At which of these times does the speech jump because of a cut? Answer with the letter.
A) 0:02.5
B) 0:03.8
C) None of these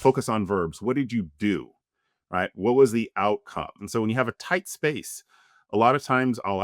B